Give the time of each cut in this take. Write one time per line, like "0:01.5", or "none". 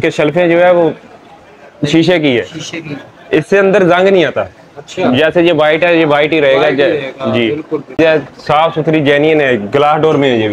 0:08.0